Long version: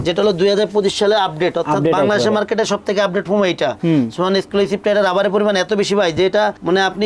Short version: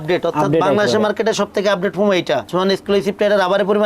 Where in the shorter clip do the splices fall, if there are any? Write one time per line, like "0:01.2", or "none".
0:02.5

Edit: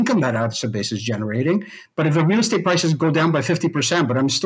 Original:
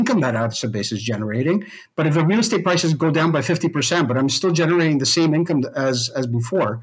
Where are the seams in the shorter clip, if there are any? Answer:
none

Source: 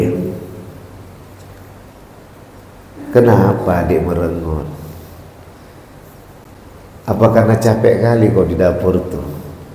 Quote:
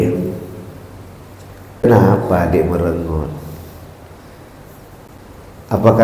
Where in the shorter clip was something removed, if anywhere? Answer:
0:01.9

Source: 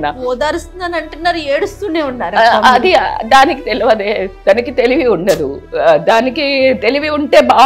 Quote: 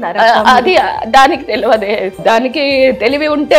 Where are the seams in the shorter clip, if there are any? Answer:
0:02.2

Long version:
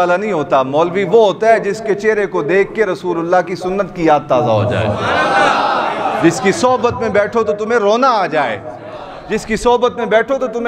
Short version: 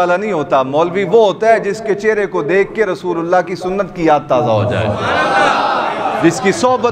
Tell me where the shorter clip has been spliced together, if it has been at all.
none

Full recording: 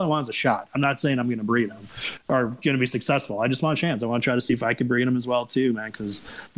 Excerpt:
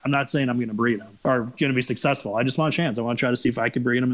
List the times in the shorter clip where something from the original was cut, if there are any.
0:01.1

